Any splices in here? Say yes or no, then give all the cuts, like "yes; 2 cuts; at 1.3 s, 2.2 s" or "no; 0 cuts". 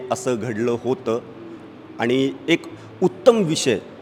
no; 0 cuts